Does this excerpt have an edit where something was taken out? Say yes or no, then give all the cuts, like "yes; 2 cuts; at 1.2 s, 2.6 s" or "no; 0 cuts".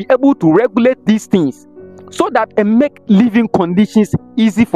no; 0 cuts